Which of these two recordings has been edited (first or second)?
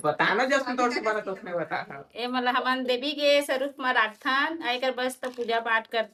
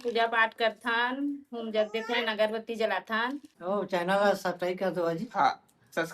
second